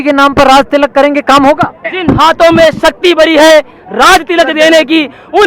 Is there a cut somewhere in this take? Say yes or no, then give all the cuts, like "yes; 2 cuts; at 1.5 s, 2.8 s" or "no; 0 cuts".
yes; 1 cut; at 1.8 s